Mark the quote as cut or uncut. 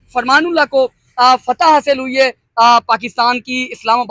uncut